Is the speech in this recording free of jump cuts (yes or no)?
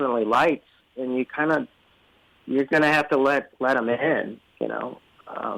yes